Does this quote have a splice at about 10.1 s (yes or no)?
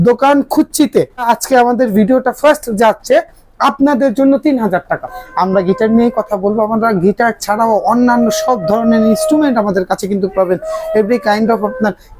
no